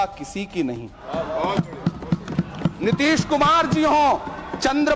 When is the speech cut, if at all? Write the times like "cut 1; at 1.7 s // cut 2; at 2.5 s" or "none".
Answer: cut 1; at 1.0 s